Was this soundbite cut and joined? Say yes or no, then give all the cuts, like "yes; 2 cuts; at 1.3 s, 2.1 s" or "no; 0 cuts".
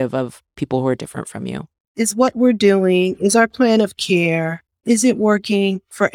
yes; 1 cut; at 1.8 s